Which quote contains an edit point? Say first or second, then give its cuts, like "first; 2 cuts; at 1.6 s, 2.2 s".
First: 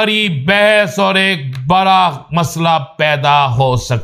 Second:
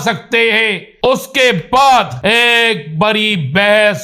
second; 2 cuts; at 1.1 s, 2.1 s